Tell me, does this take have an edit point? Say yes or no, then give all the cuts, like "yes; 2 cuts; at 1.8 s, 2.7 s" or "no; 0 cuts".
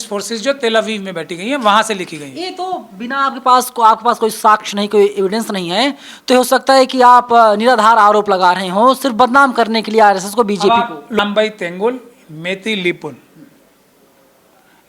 yes; 1 cut; at 11.2 s